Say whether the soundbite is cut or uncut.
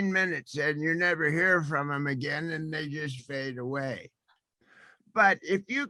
uncut